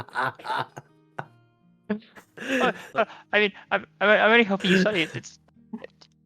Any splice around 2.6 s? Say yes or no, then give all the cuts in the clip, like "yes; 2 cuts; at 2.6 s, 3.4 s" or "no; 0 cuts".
yes; 1 cut; at 2.6 s